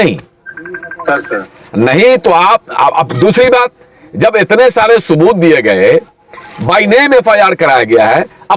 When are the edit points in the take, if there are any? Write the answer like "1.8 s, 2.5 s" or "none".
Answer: none